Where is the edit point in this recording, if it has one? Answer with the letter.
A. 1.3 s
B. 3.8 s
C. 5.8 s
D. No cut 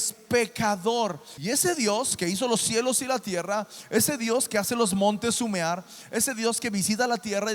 A